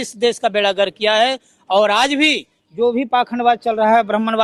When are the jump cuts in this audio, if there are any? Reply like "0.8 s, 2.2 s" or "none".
none